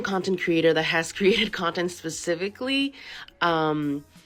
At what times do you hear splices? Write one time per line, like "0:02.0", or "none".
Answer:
none